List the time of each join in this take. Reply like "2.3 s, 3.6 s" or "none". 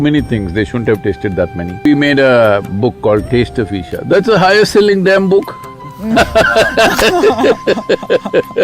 1.9 s